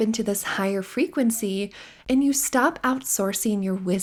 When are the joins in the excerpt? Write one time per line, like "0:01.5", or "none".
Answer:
none